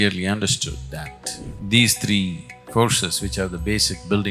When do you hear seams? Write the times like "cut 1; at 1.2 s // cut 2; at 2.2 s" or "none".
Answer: cut 1; at 1.5 s